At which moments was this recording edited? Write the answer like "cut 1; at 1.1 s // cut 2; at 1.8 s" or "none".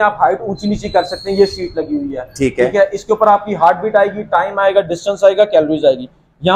none